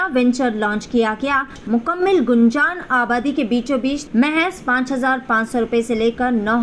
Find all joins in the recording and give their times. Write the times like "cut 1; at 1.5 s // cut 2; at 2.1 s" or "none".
cut 1; at 1.6 s // cut 2; at 4.0 s